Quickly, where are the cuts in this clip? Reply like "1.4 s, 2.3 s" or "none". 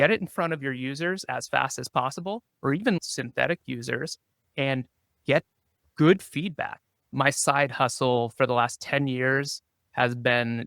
2.5 s, 7.0 s